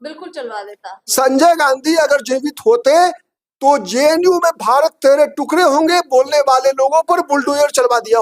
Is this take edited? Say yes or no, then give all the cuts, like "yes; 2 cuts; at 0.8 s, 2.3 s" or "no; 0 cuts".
no; 0 cuts